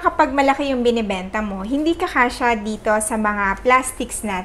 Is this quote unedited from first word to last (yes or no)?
yes